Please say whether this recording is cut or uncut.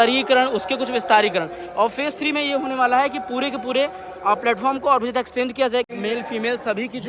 cut